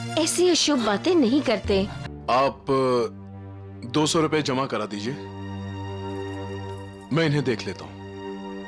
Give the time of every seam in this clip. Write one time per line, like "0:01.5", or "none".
0:02.1